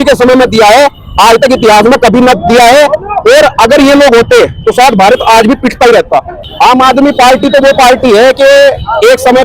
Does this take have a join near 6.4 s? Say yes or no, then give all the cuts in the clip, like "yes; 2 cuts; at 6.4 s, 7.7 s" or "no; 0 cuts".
yes; 1 cut; at 6.4 s